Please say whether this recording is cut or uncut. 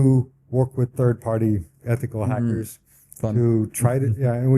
uncut